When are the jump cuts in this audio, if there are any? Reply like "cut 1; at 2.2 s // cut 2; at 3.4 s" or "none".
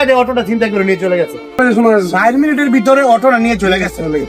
cut 1; at 1.6 s